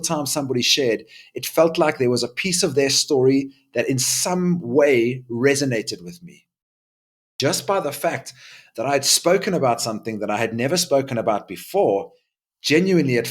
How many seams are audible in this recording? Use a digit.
1